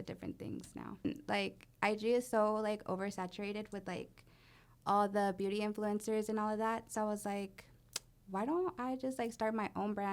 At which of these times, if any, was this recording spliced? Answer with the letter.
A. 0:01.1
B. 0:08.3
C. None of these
A